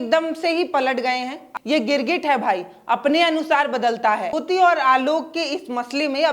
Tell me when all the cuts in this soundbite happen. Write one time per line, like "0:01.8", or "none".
0:01.4
0:04.3